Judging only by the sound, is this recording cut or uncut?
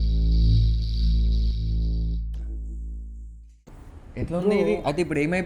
cut